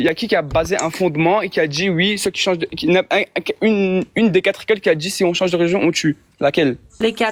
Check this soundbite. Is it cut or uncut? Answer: uncut